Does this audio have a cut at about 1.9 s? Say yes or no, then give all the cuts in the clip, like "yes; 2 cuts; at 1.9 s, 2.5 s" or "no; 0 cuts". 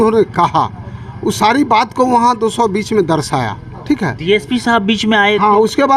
no; 0 cuts